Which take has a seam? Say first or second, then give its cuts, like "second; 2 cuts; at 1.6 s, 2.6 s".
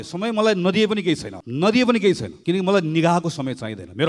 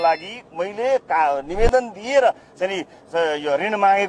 first; 2 cuts; at 1.4 s, 2.3 s